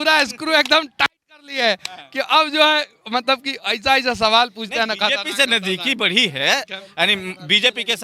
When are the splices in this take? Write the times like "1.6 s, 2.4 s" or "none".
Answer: none

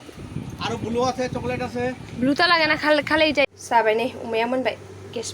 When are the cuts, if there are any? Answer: 3.4 s

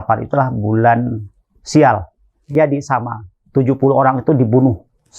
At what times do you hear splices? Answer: 2.5 s

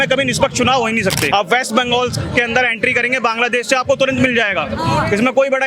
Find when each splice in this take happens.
1.3 s

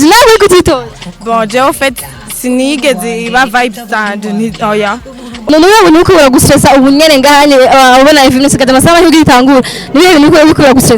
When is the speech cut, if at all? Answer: 5.5 s

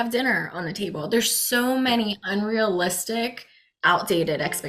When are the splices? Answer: none

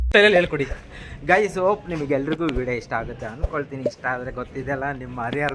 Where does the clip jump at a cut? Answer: none

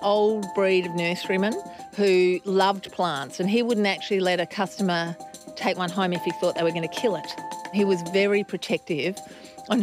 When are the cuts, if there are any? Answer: 7.4 s

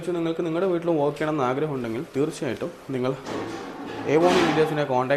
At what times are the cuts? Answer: none

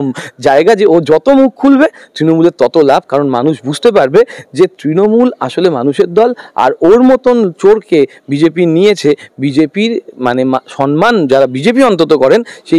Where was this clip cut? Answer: none

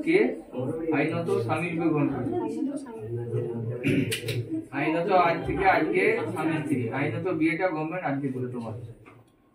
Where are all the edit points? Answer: none

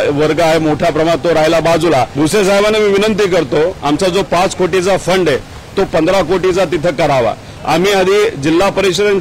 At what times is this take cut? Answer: 2.3 s, 7.5 s

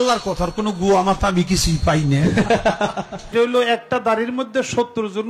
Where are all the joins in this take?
3.3 s

